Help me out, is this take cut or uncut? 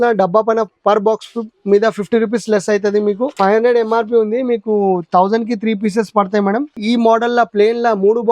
cut